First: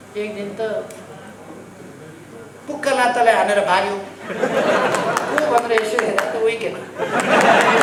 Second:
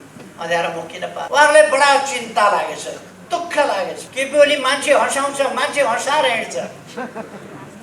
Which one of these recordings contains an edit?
second; 2 cuts; at 1.3 s, 4.0 s

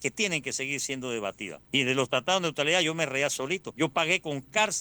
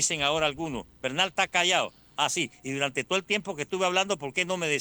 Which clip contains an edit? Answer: first; 2 cuts; at 1.5 s, 3.7 s

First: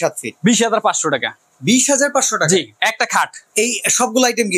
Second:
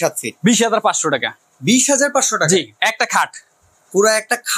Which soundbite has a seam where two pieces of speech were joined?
first; 1 cut; at 3.4 s

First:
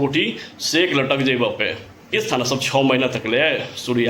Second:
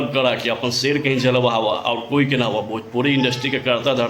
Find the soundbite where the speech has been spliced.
first; 1 cut; at 2.1 s

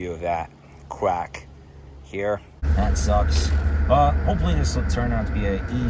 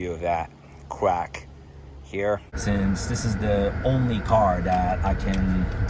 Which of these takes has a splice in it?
second; 1 cut; at 2.5 s

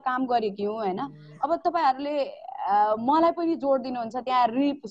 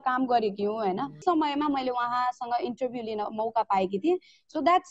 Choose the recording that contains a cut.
second; 1 cut; at 1.2 s

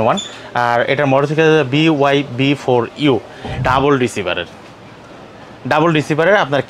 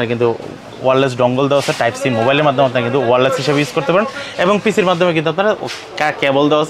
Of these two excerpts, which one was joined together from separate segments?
first; 1 cut; at 3.6 s

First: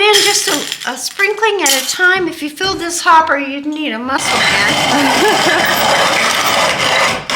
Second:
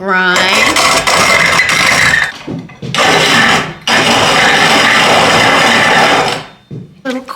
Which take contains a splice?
second; 1 cut; at 2.3 s

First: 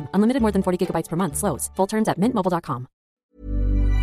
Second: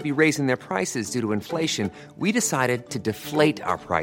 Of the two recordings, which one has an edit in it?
first; 1 cut; at 3.1 s

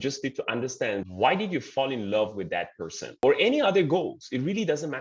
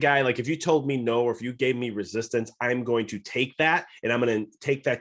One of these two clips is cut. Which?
first; 2 cuts; at 1.0 s, 3.2 s

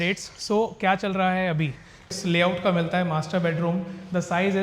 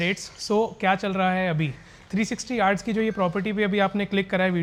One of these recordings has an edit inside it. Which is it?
first; 1 cut; at 2.1 s

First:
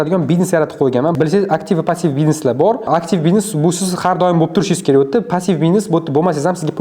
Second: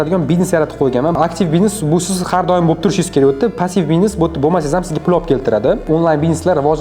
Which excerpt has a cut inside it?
second; 2 cuts; at 1.1 s, 5.8 s

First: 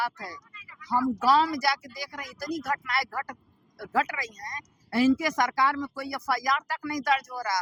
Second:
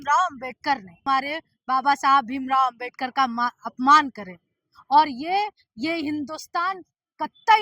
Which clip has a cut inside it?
second; 1 cut; at 1.0 s

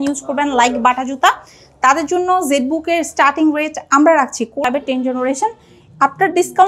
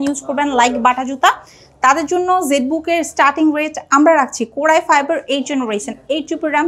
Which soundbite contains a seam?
first; 1 cut; at 4.6 s

